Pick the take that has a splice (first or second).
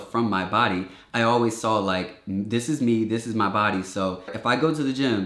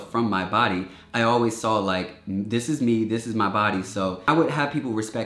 second